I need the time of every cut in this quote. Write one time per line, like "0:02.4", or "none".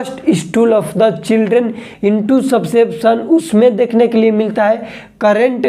0:01.8